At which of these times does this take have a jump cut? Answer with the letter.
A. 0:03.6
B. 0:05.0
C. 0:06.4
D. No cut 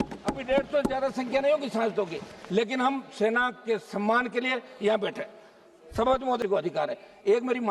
C